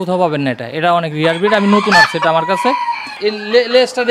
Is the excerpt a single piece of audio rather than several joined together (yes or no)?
no